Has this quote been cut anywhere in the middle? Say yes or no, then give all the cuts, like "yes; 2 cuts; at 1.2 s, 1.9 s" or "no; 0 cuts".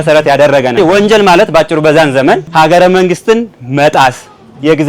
yes; 2 cuts; at 0.8 s, 2.5 s